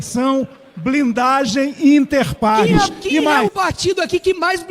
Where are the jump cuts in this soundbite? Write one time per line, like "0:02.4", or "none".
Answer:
0:03.3